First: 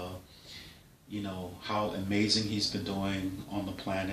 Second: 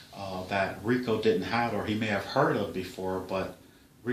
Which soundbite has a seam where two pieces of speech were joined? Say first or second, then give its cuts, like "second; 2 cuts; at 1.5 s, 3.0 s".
second; 1 cut; at 2.6 s